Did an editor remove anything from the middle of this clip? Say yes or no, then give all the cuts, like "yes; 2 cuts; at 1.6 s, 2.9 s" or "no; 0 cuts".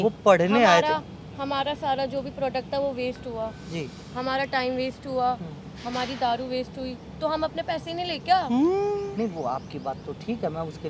no; 0 cuts